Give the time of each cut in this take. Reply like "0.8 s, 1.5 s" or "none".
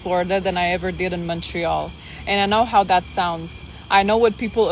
none